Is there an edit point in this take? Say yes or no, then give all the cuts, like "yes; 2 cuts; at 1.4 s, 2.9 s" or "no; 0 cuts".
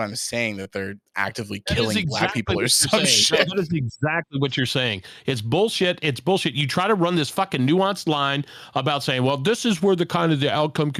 no; 0 cuts